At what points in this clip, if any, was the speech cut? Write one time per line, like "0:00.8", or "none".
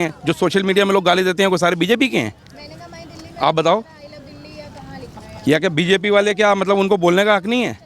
none